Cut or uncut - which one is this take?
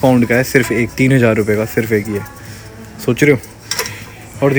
uncut